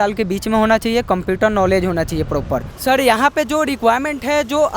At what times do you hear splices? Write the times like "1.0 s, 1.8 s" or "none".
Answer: 2.7 s